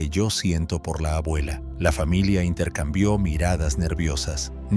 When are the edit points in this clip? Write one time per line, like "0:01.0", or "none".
0:01.6